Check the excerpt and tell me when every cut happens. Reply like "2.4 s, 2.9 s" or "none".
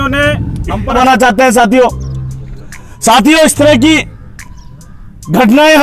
0.9 s